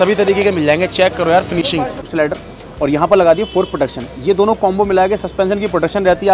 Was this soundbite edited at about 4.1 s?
no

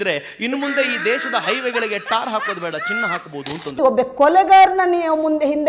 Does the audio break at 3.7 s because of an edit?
yes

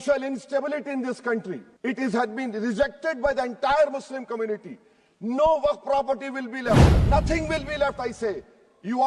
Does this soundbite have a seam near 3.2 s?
no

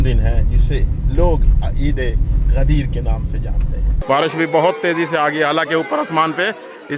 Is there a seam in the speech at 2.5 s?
no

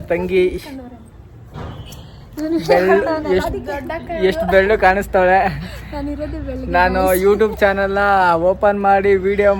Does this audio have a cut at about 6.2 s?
no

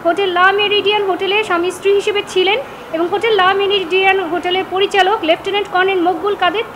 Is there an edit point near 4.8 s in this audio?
no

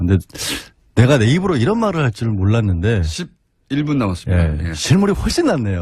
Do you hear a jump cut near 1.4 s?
no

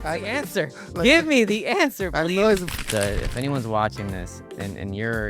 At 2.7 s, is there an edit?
yes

